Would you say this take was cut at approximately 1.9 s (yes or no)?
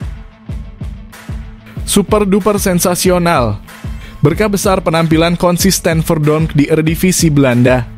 yes